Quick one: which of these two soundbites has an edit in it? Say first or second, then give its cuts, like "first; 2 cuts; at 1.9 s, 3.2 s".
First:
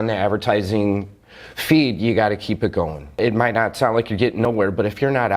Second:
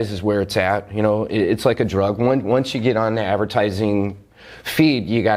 first; 1 cut; at 3.2 s